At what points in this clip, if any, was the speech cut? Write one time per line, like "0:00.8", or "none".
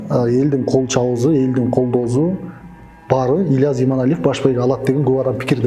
none

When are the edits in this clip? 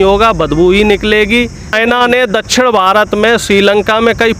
0:01.7

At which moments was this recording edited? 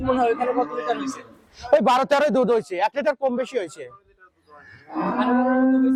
none

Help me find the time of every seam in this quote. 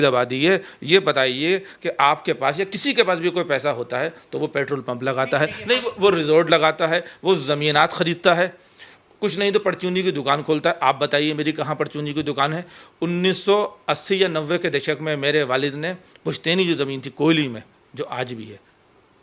none

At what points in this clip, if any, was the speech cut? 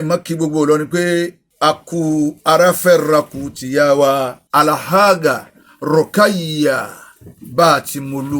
0:01.4
0:04.4

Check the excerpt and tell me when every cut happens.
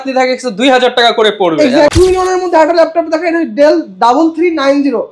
0:01.9

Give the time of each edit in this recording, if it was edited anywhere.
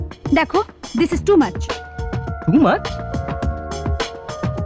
none

